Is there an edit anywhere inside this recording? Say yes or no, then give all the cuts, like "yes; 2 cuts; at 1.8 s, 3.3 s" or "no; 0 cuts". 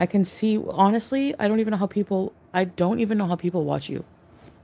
no; 0 cuts